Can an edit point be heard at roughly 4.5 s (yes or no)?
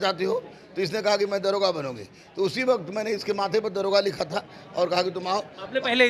no